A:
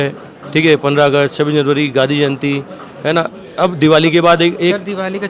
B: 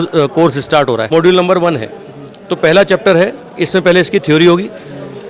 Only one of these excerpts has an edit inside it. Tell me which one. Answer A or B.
B